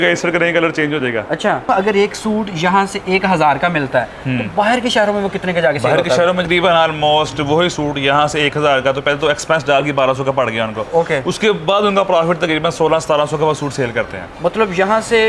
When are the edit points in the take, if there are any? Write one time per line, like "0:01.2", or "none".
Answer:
0:01.7
0:06.4